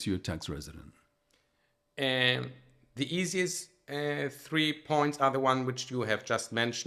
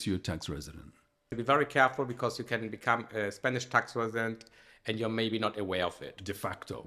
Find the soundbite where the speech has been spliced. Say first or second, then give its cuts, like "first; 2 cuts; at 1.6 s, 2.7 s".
second; 1 cut; at 1.3 s